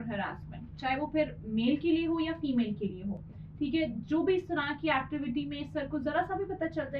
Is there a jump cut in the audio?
no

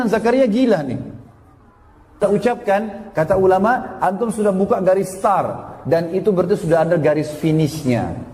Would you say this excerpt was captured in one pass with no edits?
no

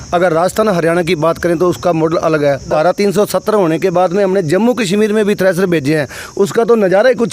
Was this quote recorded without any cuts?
no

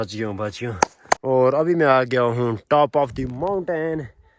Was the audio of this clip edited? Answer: no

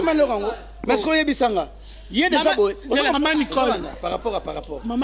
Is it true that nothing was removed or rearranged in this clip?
no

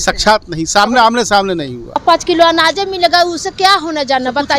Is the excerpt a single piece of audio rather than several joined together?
no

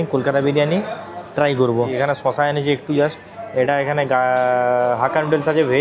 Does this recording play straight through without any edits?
no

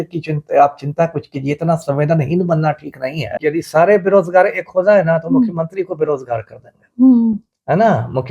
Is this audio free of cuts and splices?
no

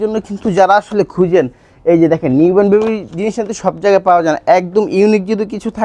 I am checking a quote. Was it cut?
no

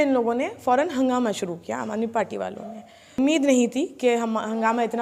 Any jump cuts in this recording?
yes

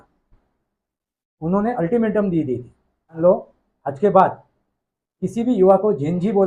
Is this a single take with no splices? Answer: no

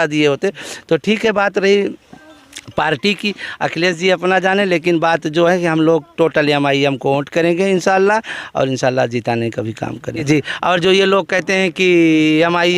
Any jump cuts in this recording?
yes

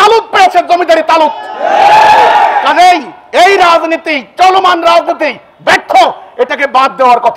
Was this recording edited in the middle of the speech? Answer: no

